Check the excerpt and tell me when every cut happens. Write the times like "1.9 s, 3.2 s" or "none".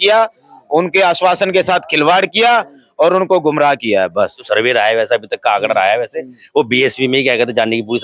4.4 s

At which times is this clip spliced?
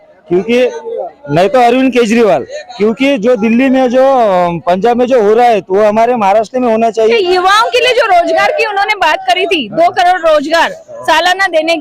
7.0 s

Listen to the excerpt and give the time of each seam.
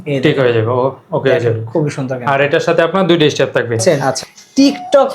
3.8 s

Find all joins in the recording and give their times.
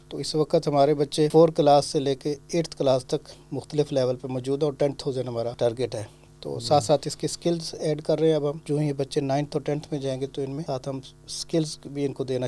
1.3 s, 5.6 s, 8.6 s, 10.6 s

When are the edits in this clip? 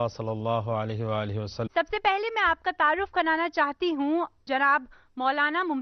none

